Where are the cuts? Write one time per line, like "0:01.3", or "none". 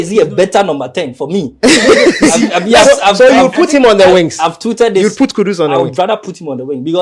none